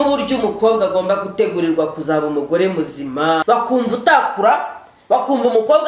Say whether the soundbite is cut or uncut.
cut